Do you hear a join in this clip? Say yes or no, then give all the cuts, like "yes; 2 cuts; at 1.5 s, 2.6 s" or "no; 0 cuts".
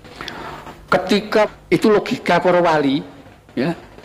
yes; 1 cut; at 1.5 s